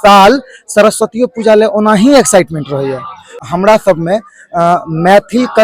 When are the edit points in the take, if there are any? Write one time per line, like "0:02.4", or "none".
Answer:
0:03.4